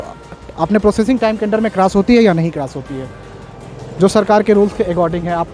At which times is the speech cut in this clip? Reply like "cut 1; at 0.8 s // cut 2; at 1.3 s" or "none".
none